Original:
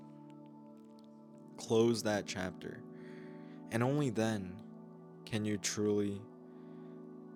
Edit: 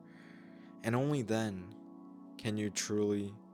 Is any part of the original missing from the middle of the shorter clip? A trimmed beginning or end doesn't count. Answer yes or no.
no